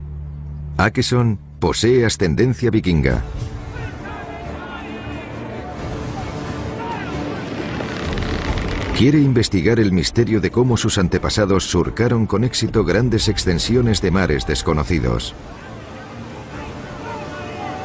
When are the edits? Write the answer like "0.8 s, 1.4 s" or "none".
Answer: 4.2 s